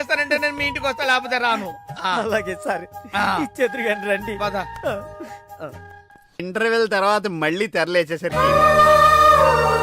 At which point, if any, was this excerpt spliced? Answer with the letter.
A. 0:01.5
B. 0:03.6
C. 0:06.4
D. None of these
C